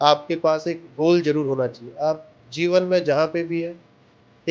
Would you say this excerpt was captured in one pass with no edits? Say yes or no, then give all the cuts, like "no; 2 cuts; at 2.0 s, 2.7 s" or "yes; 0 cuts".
yes; 0 cuts